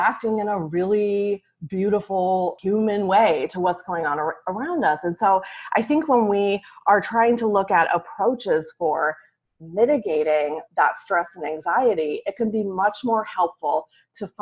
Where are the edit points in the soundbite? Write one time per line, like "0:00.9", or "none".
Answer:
0:02.6